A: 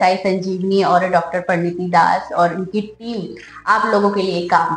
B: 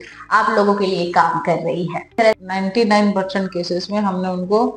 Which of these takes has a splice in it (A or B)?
B